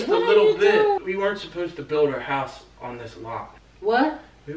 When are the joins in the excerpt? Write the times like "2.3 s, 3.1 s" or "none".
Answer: 1.0 s, 3.6 s